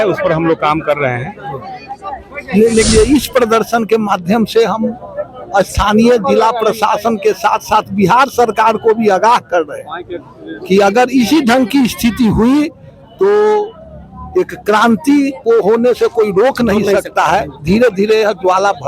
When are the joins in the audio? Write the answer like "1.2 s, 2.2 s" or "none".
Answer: 2.9 s

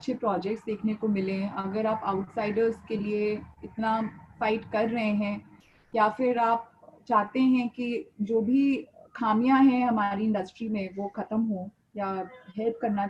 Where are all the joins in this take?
none

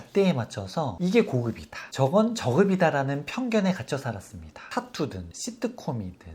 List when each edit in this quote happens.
4.5 s

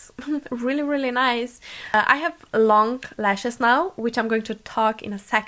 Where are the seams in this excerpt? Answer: 1.9 s

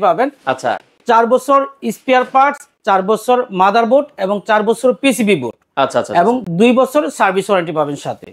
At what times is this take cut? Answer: none

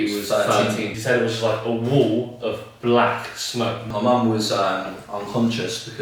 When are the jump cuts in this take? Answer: 1.0 s, 3.9 s

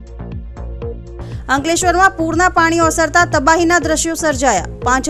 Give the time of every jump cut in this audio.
1.5 s

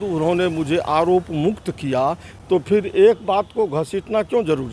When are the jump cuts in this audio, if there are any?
none

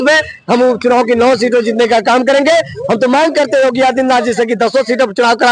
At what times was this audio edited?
none

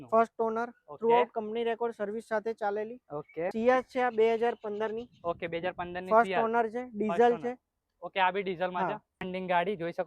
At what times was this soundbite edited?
3.5 s, 9.1 s

